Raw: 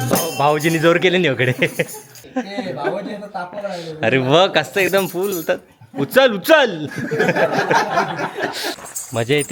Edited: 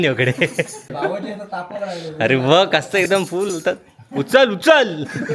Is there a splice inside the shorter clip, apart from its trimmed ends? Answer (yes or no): yes